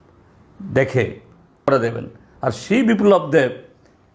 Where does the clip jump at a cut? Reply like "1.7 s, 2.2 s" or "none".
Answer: 1.7 s